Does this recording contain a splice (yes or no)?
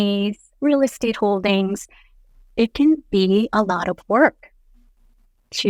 no